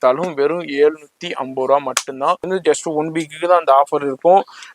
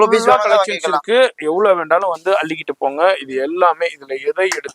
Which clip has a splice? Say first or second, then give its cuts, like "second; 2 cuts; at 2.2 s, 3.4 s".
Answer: first; 1 cut; at 2.5 s